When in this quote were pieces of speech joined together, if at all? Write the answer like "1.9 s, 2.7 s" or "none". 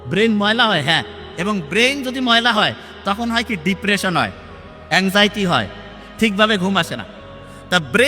none